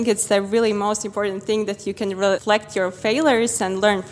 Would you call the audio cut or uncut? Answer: cut